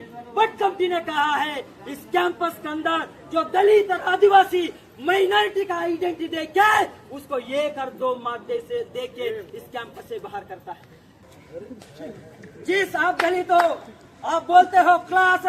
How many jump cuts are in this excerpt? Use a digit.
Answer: 1